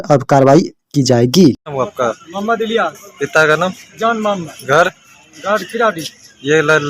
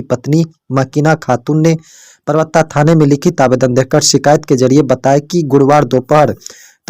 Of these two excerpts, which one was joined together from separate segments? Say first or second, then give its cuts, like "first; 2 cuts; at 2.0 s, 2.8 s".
first; 1 cut; at 1.7 s